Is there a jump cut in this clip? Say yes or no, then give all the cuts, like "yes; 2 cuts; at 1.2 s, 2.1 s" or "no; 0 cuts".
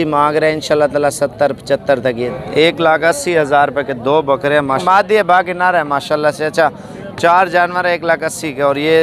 yes; 2 cuts; at 2.3 s, 4.8 s